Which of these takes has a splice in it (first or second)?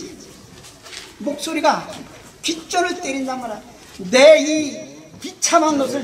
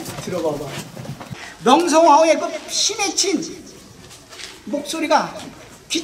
second